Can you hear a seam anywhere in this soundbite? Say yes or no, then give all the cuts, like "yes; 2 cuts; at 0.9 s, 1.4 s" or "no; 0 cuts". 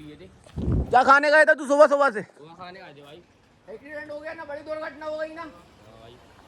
no; 0 cuts